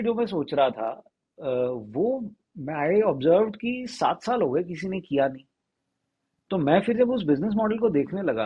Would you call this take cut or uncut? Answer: uncut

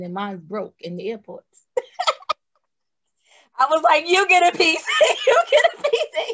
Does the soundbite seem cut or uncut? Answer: uncut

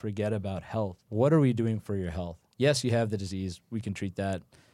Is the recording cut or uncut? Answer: cut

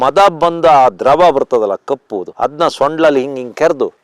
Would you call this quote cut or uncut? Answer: uncut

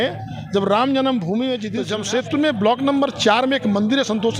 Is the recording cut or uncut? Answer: cut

